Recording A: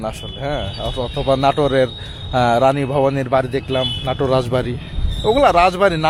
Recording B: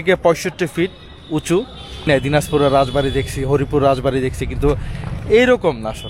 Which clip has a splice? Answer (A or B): B